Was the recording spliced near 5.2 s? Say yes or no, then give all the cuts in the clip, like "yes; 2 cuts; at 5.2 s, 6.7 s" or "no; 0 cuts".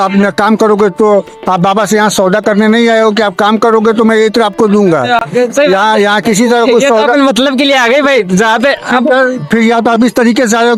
no; 0 cuts